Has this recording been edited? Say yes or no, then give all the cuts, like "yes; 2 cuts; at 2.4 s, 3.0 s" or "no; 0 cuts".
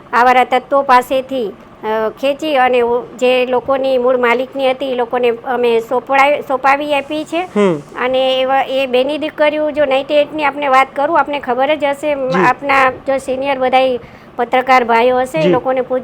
no; 0 cuts